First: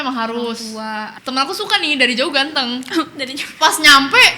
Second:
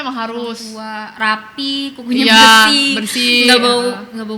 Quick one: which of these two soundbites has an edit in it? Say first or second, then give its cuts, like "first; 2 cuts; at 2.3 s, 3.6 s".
first; 1 cut; at 1.0 s